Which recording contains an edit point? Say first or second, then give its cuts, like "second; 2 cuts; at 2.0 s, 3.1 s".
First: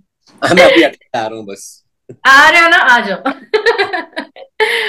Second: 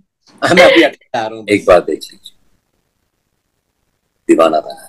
second; 1 cut; at 1.3 s